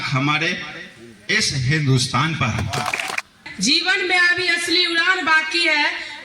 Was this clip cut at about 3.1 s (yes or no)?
yes